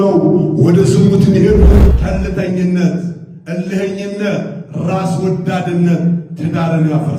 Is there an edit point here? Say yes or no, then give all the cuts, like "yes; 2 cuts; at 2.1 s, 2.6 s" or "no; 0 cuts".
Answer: yes; 1 cut; at 1.9 s